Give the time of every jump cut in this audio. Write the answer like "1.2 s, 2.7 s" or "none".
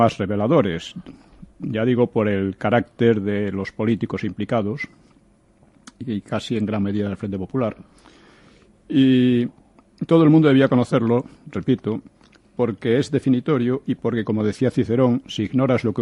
6.1 s